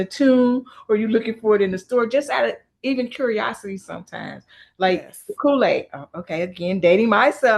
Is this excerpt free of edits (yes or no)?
no